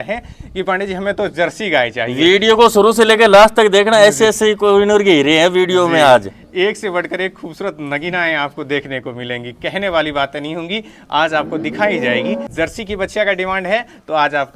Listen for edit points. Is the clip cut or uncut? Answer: uncut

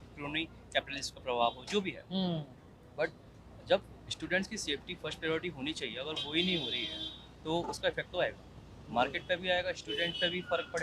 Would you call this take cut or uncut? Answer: uncut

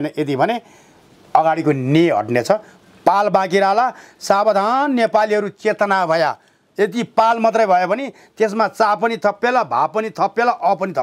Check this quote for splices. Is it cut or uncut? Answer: uncut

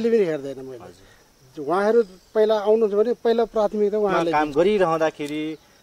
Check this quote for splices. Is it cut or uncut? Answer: cut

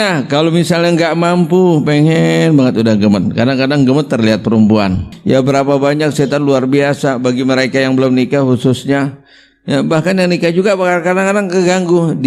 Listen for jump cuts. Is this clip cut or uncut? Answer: cut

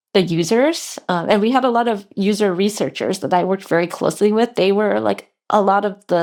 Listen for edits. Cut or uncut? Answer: uncut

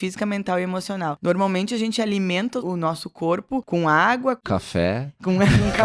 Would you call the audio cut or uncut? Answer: cut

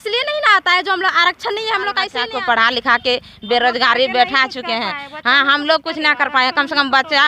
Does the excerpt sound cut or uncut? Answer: cut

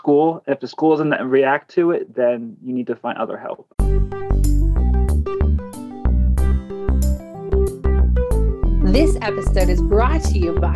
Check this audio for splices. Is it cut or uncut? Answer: cut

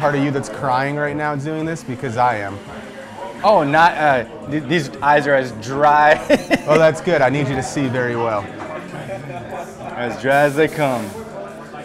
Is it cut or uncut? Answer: uncut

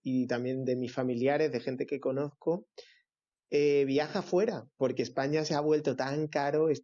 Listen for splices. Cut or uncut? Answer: uncut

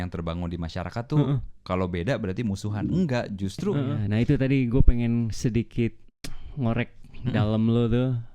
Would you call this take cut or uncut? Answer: cut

